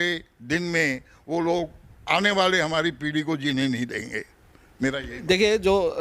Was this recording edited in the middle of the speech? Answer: no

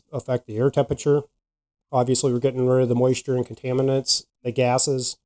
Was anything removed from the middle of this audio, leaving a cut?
yes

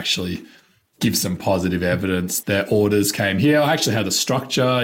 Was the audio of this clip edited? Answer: yes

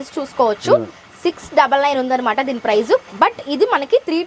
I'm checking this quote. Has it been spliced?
no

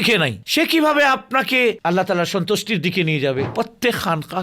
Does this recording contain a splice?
yes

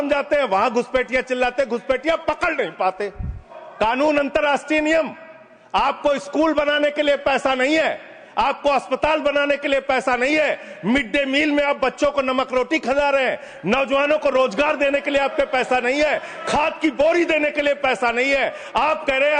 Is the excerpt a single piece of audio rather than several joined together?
no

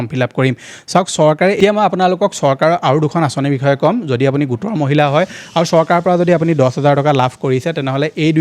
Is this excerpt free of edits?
no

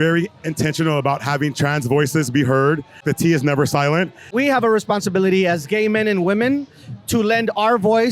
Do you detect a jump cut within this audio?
yes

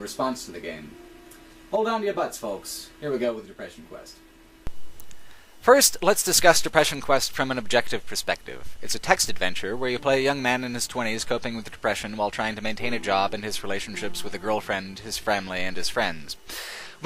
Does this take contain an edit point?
no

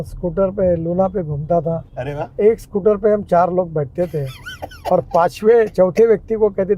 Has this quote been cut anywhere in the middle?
no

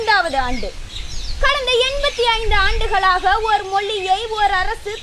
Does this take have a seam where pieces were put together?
no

